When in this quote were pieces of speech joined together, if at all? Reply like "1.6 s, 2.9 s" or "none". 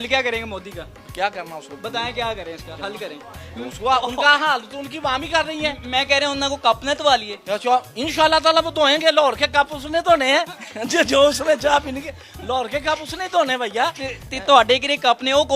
none